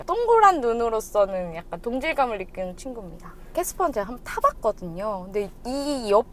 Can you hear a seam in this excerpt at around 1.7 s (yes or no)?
no